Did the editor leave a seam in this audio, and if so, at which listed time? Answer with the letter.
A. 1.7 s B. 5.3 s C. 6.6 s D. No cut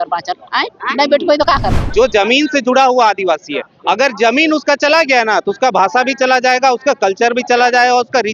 A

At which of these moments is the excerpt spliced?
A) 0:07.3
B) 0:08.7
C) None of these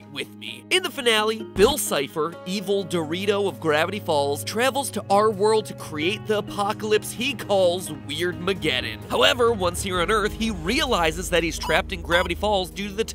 B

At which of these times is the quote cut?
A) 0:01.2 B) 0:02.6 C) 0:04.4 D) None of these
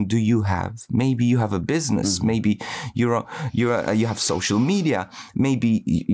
D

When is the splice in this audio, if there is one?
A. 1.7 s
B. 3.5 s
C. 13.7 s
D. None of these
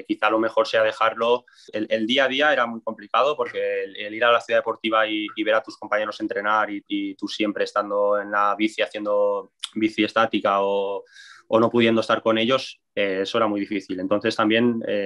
A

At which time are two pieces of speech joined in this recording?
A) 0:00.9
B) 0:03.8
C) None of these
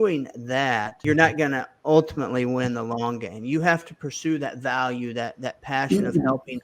A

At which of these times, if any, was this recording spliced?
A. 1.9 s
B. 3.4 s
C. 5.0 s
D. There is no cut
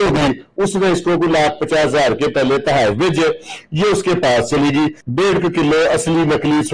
C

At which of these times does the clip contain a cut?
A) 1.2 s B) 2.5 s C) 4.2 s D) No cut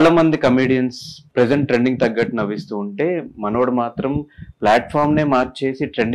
A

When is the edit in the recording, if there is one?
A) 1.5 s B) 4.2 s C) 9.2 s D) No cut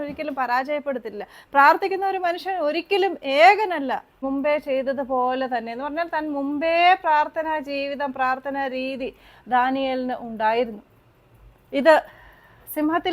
B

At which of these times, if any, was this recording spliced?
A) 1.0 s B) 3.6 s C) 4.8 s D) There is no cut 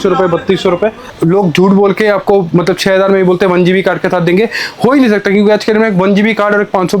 A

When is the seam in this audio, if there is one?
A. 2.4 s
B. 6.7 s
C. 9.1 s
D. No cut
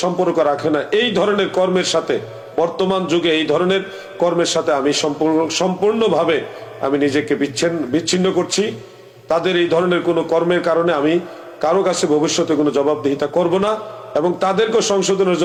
D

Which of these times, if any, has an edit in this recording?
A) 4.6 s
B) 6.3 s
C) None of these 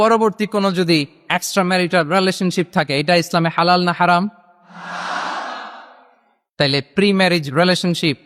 C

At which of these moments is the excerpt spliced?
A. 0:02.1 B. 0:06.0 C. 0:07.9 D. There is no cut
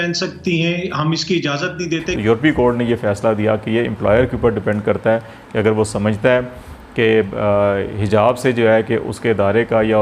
A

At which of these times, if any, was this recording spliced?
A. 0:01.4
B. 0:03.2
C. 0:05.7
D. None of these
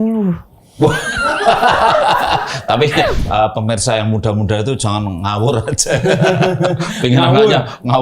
B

